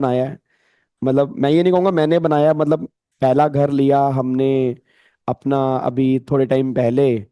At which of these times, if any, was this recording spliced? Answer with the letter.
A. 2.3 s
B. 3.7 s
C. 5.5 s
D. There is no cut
D